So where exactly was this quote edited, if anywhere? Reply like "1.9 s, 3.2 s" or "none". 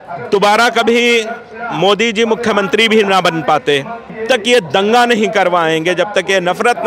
4.2 s

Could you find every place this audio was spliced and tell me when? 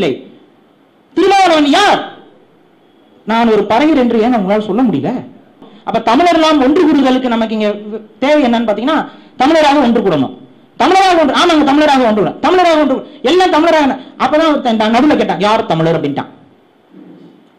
5.7 s

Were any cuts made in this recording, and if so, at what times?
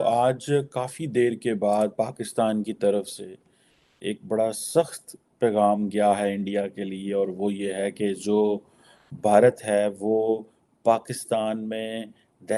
none

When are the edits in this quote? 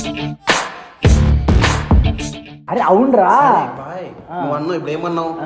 none

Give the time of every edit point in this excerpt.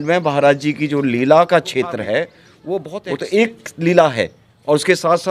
2.9 s

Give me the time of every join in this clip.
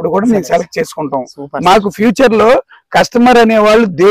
none

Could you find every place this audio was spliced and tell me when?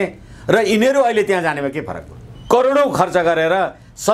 2.4 s

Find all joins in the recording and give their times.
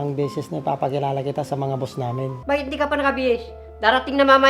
2.3 s

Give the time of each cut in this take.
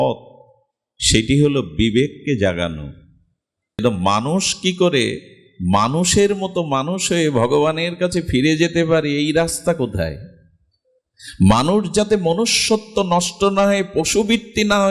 3.8 s

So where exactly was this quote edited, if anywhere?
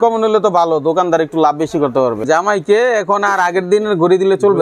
2.2 s

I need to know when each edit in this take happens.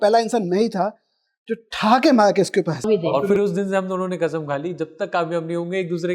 2.8 s

